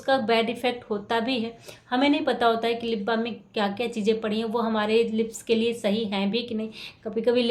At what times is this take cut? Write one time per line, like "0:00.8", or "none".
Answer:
none